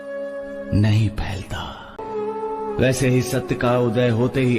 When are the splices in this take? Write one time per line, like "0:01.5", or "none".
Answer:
0:02.0